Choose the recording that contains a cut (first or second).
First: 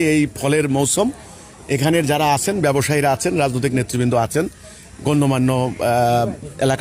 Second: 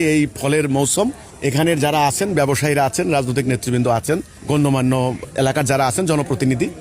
second